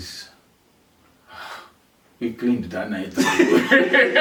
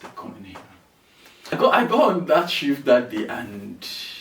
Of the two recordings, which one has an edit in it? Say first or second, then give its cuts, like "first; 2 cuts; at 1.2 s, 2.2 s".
second; 1 cut; at 1.5 s